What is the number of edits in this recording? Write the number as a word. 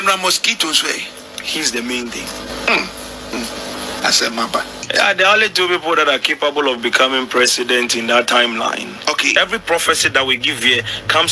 four